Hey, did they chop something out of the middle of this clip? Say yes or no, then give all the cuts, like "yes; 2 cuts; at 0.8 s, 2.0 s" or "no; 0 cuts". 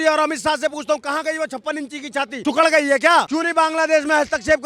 no; 0 cuts